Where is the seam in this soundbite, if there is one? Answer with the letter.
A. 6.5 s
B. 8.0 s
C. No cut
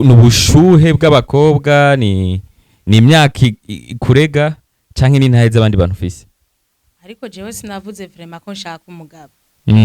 C